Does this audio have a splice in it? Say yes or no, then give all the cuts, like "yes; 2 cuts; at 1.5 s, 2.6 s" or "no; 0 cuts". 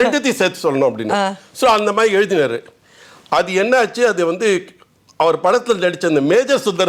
no; 0 cuts